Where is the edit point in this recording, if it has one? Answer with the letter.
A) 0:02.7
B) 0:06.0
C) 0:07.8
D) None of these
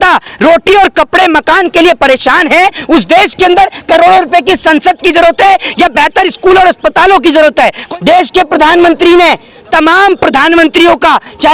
C